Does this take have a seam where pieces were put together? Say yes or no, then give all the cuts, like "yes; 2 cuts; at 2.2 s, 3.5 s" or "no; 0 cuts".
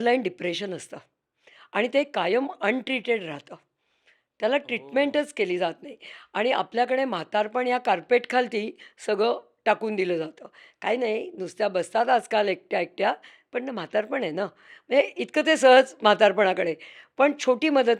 no; 0 cuts